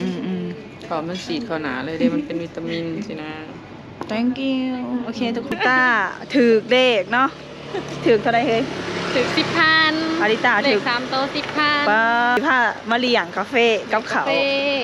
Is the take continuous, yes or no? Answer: no